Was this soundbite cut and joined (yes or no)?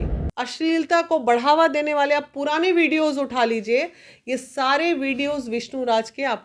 no